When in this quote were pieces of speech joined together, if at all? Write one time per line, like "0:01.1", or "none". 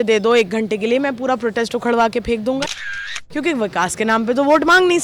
0:02.7